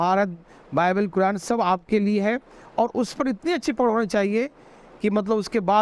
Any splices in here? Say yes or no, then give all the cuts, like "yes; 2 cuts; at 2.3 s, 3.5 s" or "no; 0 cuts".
no; 0 cuts